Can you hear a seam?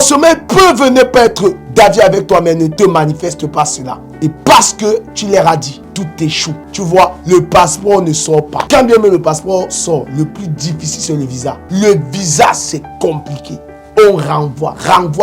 yes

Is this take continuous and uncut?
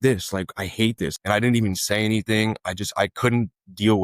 no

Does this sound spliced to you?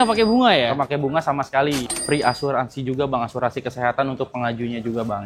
yes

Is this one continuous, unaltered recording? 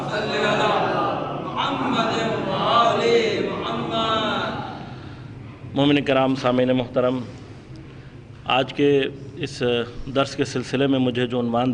yes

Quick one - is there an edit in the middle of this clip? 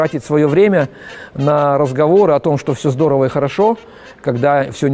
no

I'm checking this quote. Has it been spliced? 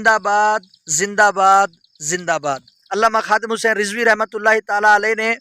yes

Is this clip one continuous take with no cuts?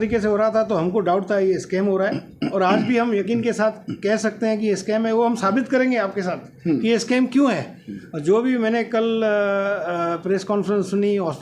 yes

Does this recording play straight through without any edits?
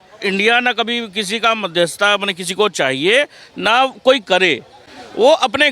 yes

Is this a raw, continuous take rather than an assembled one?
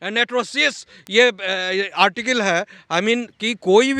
yes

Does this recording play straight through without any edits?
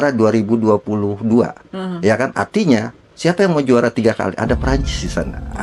yes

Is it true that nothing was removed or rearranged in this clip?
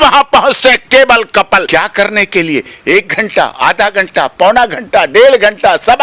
no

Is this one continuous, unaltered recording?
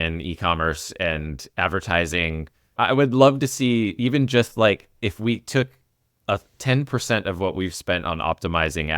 no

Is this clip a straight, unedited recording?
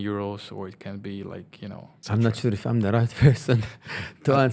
no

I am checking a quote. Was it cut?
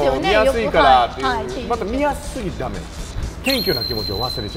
no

